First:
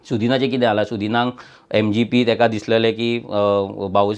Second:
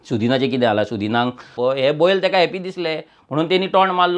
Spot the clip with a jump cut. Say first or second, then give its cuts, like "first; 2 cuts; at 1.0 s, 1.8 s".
second; 1 cut; at 1.5 s